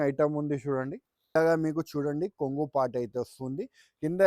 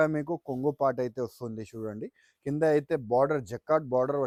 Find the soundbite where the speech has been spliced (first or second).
first